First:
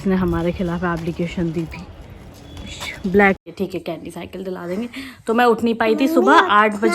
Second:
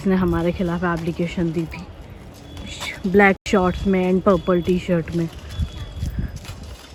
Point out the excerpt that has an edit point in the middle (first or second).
first